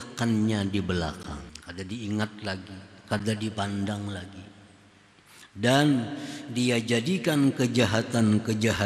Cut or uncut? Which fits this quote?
cut